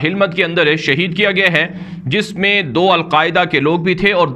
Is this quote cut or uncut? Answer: uncut